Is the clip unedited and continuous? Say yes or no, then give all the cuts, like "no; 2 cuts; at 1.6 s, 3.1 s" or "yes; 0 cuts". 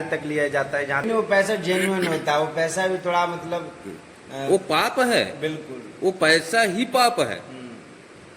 no; 1 cut; at 1.1 s